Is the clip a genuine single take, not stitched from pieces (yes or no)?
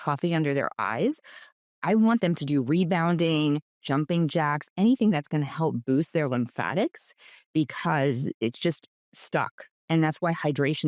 yes